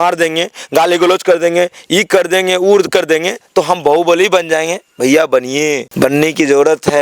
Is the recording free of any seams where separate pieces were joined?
no; 1 cut; at 5.9 s

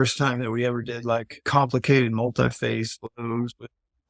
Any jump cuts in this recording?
yes; 1 cut; at 1.4 s

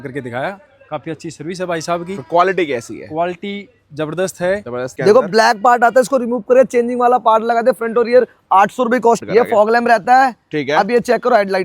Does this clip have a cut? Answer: yes; 2 cuts; at 4.9 s, 9.2 s

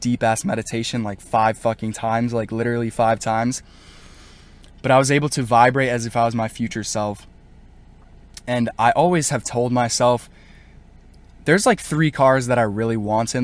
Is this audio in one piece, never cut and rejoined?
yes; 0 cuts

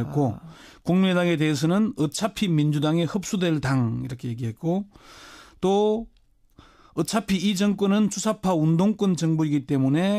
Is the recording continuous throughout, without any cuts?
no; 1 cut; at 3.9 s

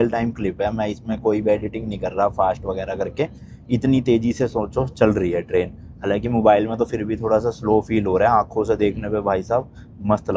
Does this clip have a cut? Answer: no; 0 cuts

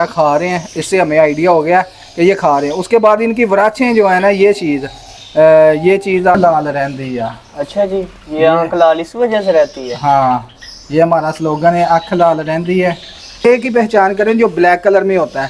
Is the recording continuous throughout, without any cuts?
no; 2 cuts; at 6.3 s, 13.5 s

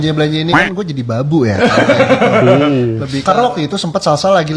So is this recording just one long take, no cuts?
no; 1 cut; at 3.2 s

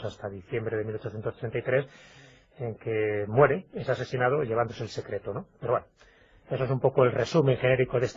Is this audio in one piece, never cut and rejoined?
no; 1 cut; at 6.9 s

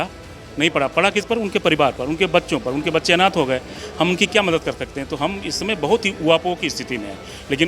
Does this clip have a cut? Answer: yes; 1 cut; at 3.8 s

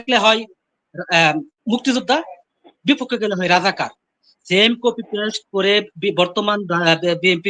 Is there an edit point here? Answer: no; 0 cuts

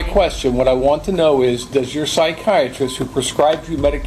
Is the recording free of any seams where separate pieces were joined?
yes; 0 cuts

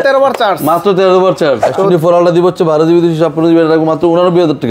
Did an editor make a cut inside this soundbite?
yes; 1 cut; at 1.6 s

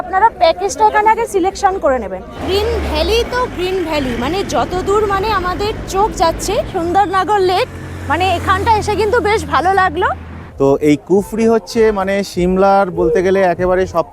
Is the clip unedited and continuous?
no; 3 cuts; at 2.4 s, 6.7 s, 10.4 s

